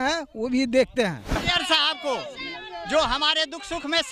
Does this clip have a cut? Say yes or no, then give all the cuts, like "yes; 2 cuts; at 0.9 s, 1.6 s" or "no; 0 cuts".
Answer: yes; 1 cut; at 1.5 s